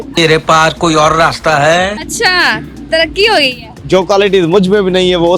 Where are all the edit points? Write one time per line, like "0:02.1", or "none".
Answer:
0:03.7